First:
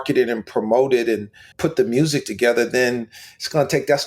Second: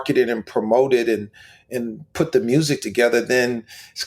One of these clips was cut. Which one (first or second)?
first